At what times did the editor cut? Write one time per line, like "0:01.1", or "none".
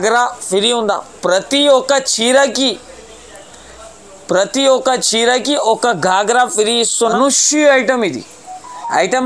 0:07.1